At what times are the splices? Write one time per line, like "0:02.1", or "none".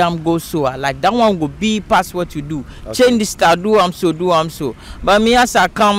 none